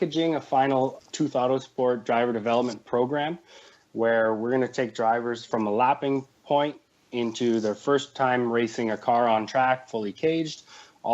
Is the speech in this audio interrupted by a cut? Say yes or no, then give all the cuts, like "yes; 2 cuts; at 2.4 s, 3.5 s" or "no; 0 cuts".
yes; 2 cuts; at 1.0 s, 5.4 s